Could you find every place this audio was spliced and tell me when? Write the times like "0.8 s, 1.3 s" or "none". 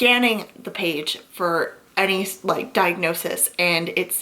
none